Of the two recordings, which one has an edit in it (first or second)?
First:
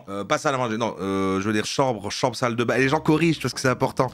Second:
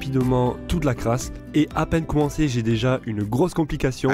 first